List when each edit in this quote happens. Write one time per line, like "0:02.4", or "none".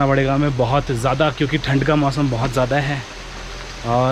none